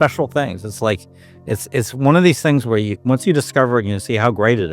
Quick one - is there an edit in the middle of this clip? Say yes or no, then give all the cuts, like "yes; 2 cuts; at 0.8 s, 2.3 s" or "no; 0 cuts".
no; 0 cuts